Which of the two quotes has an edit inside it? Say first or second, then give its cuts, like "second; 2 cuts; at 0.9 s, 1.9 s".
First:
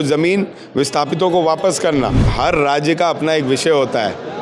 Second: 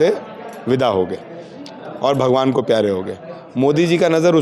first; 1 cut; at 2.3 s